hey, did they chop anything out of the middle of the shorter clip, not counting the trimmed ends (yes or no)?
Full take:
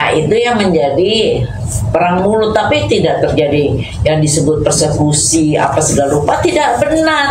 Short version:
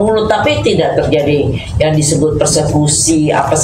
no